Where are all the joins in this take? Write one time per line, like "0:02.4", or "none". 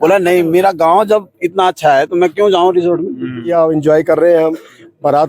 0:03.5

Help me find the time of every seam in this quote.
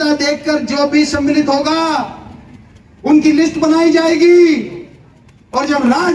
none

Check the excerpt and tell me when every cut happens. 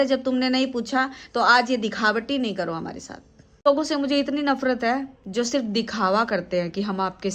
0:03.6

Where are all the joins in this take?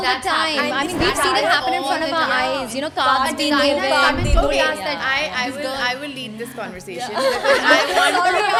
none

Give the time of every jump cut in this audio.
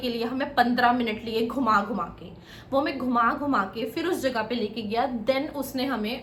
none

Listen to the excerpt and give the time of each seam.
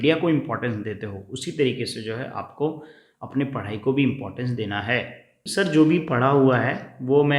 0:05.5

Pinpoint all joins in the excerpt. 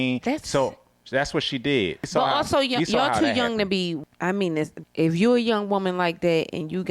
0:02.1
0:04.1
0:04.8

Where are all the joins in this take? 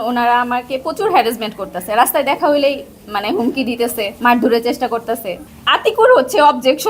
0:04.1
0:05.4

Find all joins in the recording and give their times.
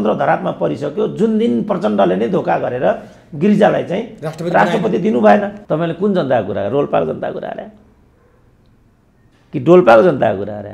0:05.6

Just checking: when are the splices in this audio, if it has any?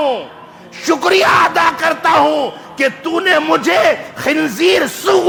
none

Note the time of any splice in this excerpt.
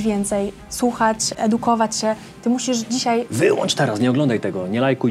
0:01.3
0:03.3

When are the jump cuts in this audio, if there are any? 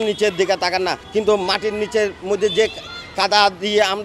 0:01.0

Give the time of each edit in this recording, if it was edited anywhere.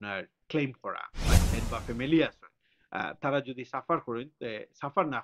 0:01.3

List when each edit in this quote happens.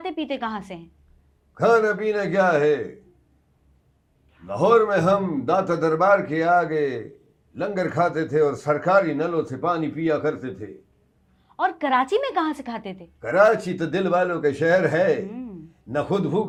none

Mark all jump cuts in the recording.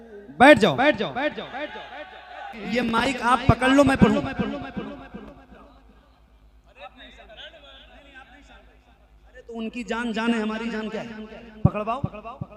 0:02.5

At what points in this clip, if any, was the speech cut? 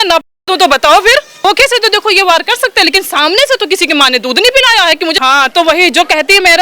0:01.4
0:05.2

